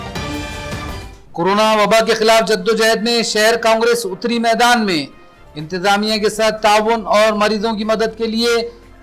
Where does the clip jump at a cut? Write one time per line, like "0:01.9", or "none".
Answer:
0:00.9